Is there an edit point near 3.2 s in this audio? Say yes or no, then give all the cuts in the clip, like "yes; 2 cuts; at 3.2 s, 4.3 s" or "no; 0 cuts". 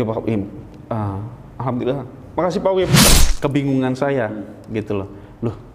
yes; 1 cut; at 3.2 s